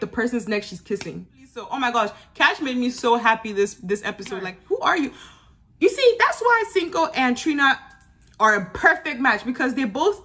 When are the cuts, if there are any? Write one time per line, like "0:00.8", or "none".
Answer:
0:01.7
0:04.5